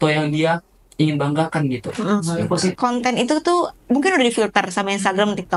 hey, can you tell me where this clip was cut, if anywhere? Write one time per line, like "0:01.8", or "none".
0:02.8